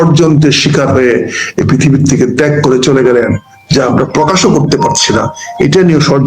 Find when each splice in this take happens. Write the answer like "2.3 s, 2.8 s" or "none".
none